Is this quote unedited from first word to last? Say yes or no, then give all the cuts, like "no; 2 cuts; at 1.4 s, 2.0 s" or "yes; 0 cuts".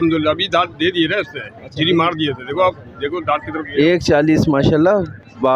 yes; 0 cuts